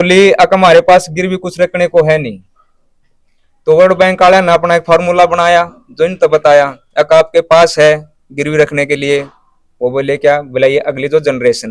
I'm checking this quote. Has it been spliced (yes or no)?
no